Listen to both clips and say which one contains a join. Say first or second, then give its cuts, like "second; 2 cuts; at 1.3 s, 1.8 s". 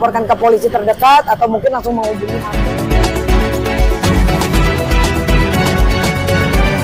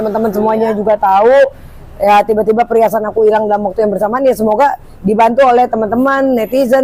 first; 1 cut; at 2.3 s